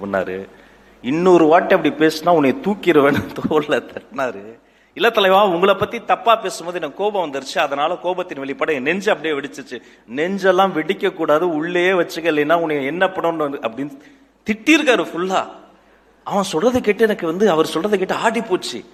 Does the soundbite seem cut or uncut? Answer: uncut